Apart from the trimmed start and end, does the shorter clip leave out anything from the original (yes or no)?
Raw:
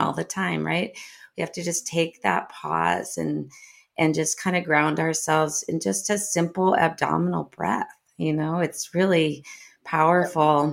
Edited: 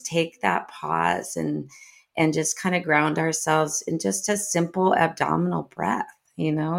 no